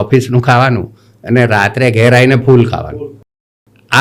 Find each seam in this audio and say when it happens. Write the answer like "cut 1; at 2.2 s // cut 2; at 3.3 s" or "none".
none